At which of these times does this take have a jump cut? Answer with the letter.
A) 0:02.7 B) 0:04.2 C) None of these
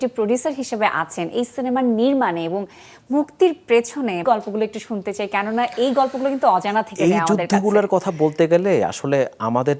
B